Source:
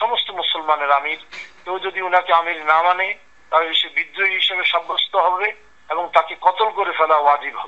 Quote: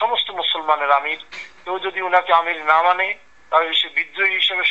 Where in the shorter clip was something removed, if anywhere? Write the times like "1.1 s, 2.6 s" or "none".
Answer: none